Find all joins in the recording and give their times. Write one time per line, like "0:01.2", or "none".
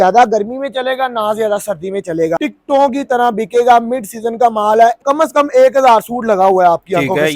0:02.4
0:05.0